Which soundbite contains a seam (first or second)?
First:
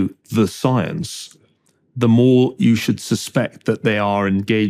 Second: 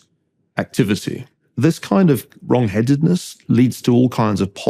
second